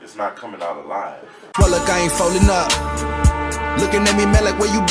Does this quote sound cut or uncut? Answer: cut